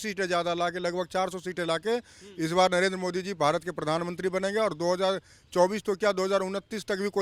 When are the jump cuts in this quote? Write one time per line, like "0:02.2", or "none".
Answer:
none